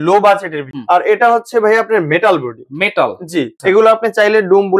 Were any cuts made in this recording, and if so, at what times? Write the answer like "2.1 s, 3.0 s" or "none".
0.8 s, 3.5 s